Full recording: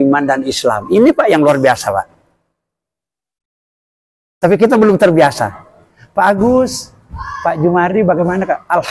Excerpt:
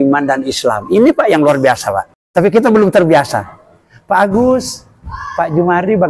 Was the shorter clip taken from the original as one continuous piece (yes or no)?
no